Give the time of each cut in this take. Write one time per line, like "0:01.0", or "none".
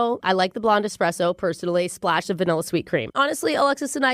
0:03.1